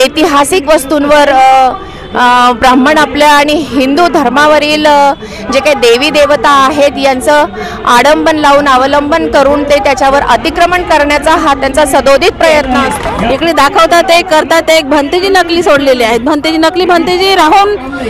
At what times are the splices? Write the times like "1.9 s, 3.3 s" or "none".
12.8 s